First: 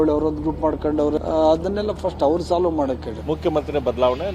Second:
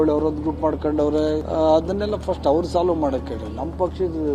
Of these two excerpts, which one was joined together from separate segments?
first; 2 cuts; at 1.2 s, 3.1 s

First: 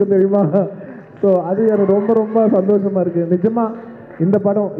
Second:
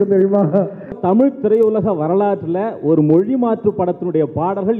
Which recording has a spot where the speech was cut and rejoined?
second; 1 cut; at 1.0 s

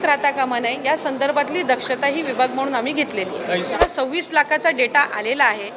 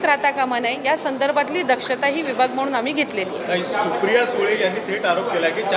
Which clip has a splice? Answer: first; 1 cut; at 3.7 s

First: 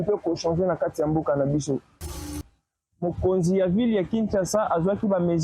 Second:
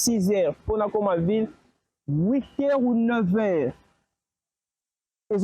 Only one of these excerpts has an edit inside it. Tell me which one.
first; 1 cut; at 2.2 s

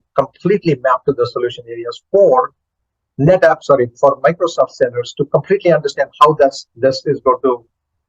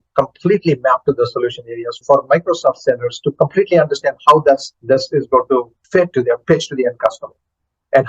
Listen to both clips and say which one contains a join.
second; 2 cuts; at 2.0 s, 6.0 s

